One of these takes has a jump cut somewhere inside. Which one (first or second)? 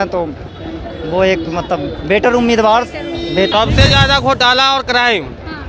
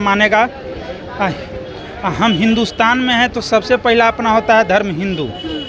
first